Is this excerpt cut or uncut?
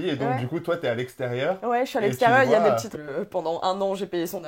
cut